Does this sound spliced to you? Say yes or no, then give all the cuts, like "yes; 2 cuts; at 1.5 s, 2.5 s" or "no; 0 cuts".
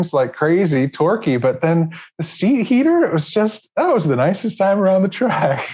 no; 0 cuts